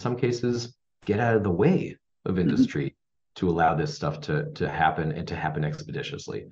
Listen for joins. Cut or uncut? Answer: uncut